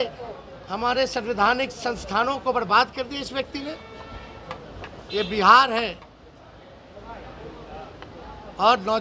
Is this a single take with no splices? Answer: yes; 0 cuts

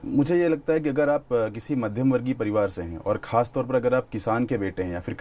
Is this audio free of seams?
yes; 0 cuts

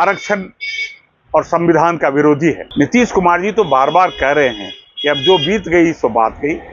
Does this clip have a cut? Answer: yes; 1 cut; at 2.6 s

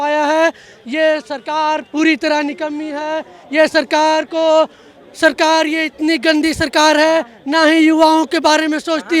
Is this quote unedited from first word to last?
yes; 0 cuts

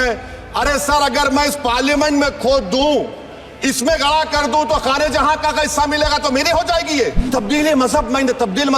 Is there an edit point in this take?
yes; 1 cut; at 7.2 s

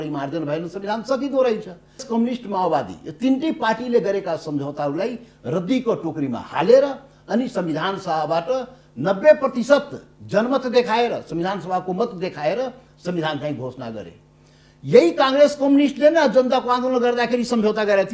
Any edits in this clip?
yes; 1 cut; at 2.0 s

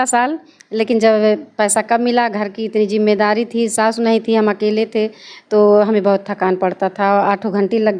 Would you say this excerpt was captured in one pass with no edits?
yes; 0 cuts

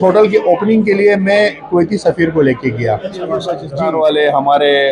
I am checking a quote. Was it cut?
yes; 1 cut; at 3.6 s

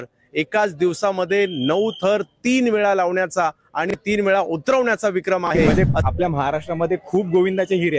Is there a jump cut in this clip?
yes; 1 cut; at 5.7 s

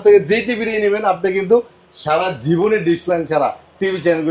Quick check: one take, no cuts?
yes; 0 cuts

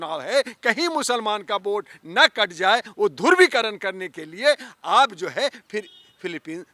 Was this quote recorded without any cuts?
yes; 0 cuts

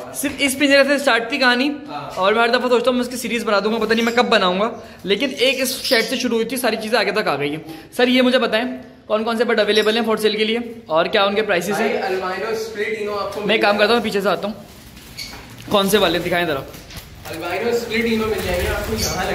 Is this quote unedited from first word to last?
yes; 0 cuts

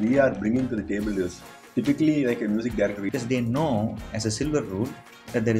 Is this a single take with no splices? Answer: no; 1 cut; at 3.0 s

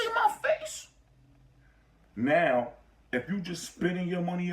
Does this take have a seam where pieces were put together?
yes; 1 cut; at 1.7 s

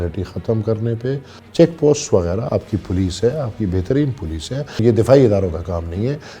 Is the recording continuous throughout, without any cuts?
no; 2 cuts; at 1.3 s, 4.7 s

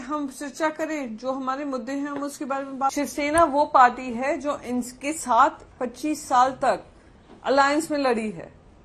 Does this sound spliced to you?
yes; 1 cut; at 2.9 s

